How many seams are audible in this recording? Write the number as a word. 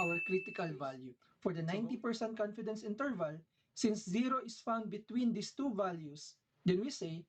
one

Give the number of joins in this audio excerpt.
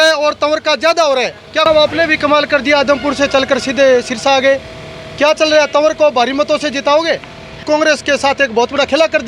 two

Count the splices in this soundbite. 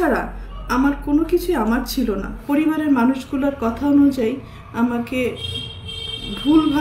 one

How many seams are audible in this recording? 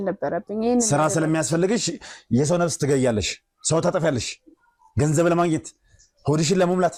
zero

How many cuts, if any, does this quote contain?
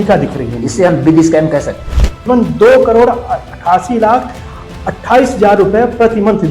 one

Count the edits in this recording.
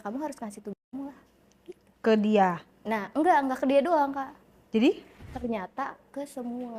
one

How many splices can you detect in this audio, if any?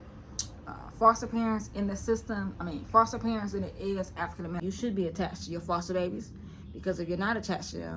one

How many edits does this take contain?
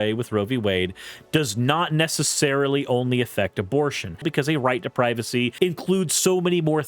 two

